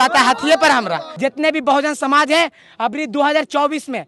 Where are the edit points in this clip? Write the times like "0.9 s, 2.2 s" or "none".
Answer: 1.0 s